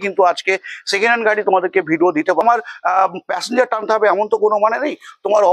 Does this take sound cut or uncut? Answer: cut